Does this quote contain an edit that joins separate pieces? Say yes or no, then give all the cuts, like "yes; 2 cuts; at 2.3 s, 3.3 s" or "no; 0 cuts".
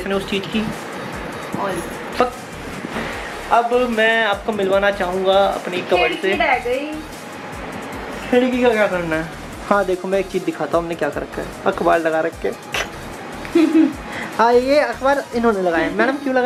no; 0 cuts